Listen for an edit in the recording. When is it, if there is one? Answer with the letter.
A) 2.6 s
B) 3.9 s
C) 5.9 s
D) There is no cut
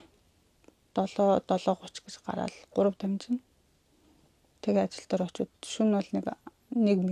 D